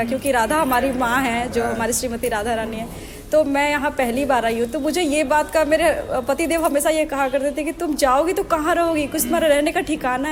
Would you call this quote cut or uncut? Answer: uncut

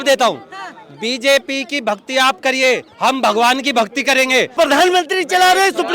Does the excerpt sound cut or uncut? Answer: cut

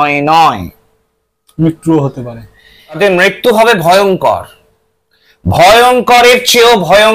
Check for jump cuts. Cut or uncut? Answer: cut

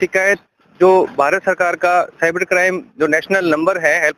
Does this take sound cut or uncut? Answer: uncut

